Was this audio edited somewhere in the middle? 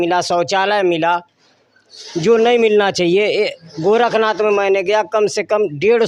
no; 0 cuts

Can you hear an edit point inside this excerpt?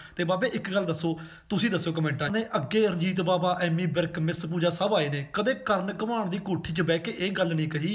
yes; 1 cut; at 2.2 s

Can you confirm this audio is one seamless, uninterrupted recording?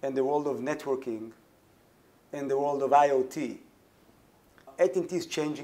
no; 1 cut; at 4.7 s

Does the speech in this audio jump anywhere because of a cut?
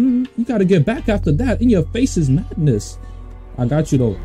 no; 0 cuts

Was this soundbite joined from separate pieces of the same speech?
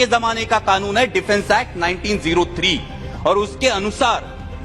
no; 0 cuts

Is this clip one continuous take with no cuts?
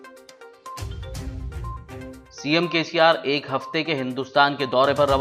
no; 1 cut; at 2.2 s

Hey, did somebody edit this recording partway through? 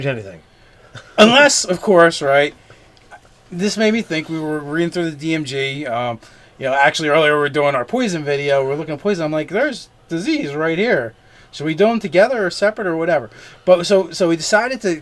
yes; 1 cut; at 10.5 s

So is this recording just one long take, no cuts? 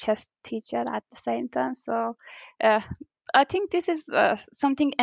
yes; 0 cuts

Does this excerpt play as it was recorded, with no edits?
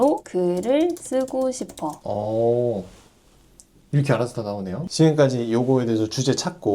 no; 2 cuts; at 2.0 s, 4.8 s

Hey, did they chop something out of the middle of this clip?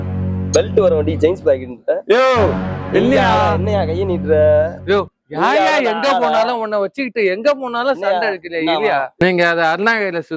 yes; 1 cut; at 9.1 s

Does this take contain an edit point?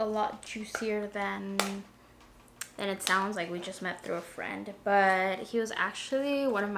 no; 0 cuts

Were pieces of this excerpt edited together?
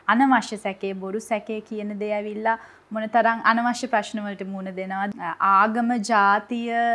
yes; 1 cut; at 5.1 s

